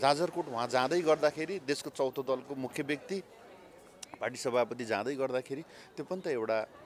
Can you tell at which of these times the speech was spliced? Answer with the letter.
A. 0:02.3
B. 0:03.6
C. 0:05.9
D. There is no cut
D